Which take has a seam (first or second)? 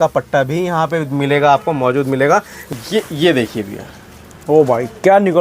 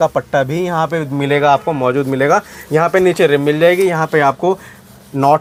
first